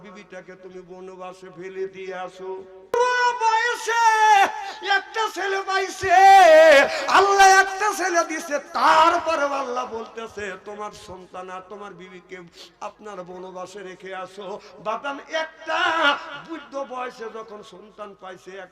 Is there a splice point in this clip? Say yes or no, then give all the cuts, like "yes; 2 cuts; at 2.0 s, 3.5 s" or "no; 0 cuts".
yes; 1 cut; at 2.9 s